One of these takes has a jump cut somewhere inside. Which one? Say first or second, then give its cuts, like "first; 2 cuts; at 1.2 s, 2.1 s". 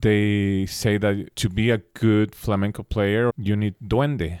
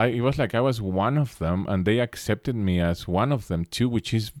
first; 2 cuts; at 1.3 s, 3.3 s